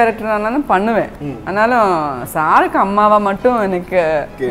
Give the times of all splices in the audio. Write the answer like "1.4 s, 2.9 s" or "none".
none